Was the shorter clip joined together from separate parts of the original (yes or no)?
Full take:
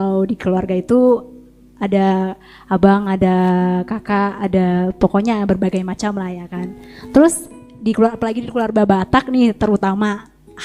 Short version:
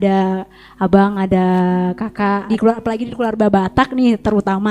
yes